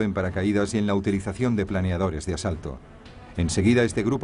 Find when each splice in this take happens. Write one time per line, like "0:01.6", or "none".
0:02.6